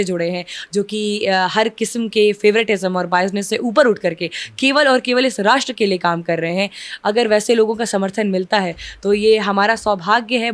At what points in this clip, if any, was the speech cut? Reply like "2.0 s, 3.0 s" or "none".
none